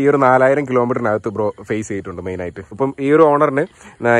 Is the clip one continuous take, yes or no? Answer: no